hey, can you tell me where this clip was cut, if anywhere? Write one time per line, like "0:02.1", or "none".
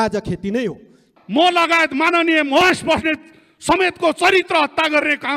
0:01.1

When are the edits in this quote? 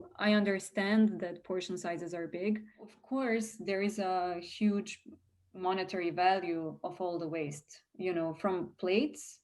0:03.0

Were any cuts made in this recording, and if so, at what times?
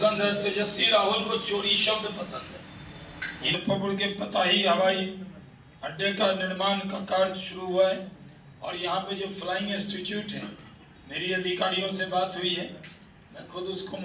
0:03.5

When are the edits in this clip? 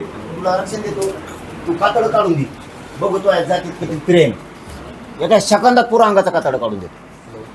none

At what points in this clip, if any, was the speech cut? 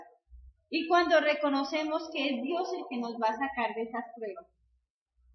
0:03.4

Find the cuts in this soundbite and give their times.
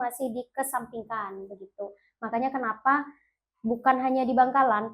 none

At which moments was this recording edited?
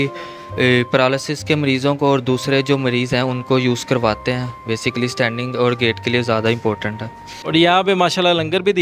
0:07.3

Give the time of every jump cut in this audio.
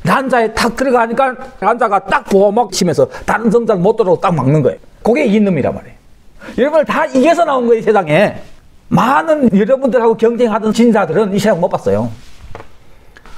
0:04.8

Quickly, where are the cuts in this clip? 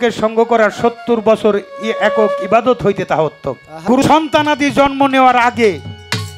0:03.7

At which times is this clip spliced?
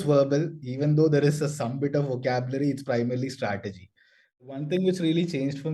0:04.6

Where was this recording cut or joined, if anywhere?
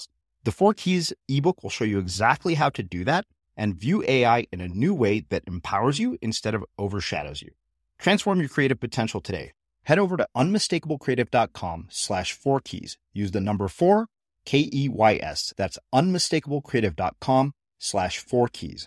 none

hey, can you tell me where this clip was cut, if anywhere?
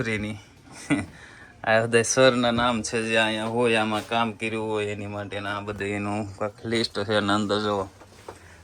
none

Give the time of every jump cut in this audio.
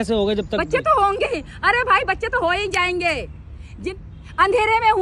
0:03.8

